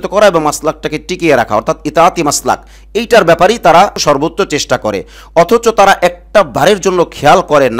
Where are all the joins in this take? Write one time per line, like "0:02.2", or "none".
0:04.0